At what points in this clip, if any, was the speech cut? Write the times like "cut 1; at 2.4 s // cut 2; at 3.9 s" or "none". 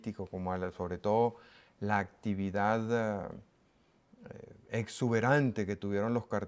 none